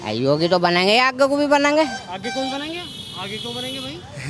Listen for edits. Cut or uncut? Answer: uncut